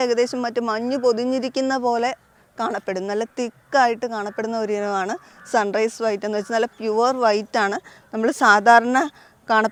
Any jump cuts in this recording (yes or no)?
no